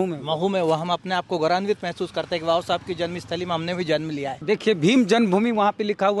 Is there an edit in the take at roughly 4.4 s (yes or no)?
yes